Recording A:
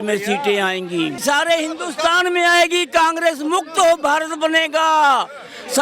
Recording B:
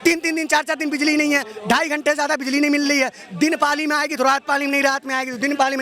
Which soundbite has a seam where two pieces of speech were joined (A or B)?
A